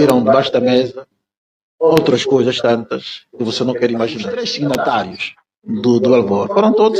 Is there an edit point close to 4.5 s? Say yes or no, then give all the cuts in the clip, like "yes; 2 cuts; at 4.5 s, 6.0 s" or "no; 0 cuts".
yes; 1 cut; at 4.5 s